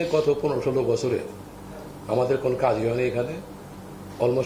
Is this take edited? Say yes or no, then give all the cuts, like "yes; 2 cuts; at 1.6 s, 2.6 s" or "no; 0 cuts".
no; 0 cuts